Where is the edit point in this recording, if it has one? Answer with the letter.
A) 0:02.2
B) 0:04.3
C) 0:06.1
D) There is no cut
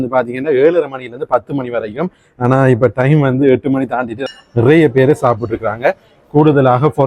B